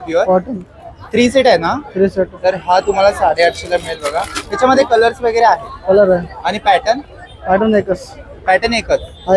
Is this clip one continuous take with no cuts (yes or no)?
yes